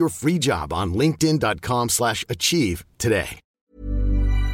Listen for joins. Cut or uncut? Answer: cut